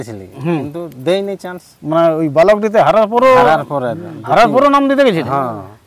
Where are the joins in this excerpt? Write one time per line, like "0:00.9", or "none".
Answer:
none